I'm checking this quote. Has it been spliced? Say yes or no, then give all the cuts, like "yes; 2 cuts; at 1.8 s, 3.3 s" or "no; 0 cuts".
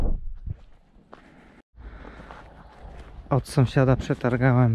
no; 0 cuts